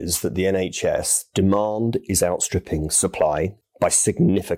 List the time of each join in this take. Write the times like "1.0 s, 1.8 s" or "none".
3.6 s